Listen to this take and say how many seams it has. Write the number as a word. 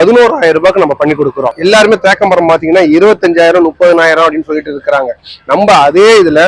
one